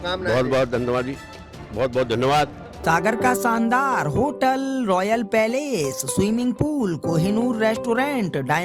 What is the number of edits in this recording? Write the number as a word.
one